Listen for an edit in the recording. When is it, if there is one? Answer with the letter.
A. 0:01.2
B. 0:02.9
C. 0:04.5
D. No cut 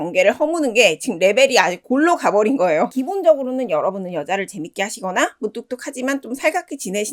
B